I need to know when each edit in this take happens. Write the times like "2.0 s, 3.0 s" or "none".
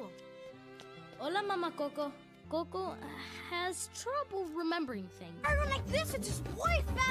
2.3 s

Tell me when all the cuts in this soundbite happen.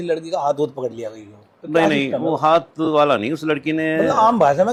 none

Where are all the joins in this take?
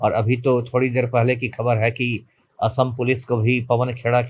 none

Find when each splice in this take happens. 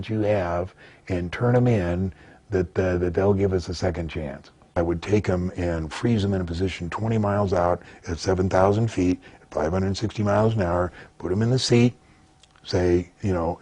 4.6 s

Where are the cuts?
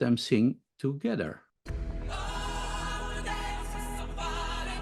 1.5 s

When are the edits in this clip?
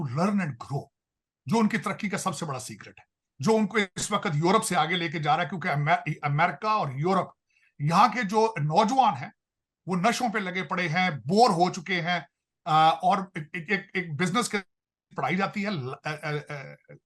none

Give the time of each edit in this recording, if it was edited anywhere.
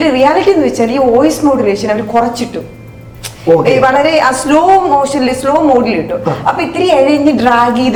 none

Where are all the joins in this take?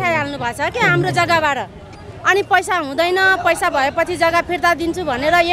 none

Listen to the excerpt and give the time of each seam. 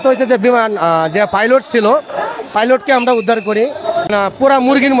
4.1 s

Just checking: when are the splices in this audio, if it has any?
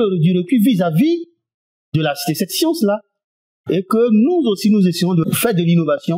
5.3 s

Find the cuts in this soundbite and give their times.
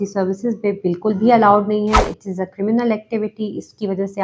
none

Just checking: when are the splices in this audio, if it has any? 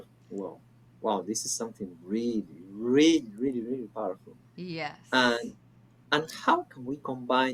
none

